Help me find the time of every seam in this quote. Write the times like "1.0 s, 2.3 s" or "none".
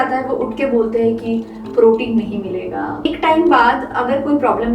3.0 s